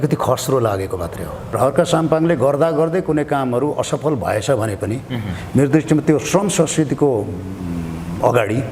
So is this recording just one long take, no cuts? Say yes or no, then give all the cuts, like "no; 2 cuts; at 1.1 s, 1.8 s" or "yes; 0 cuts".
no; 1 cut; at 1.6 s